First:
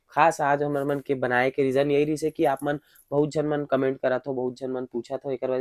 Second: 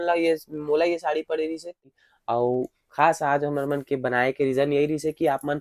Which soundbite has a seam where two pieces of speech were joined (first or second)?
second